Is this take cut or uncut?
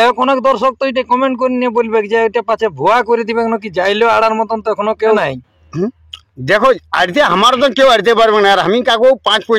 cut